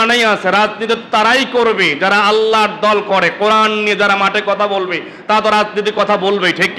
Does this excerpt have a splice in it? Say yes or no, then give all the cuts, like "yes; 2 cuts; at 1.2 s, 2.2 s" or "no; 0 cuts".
no; 0 cuts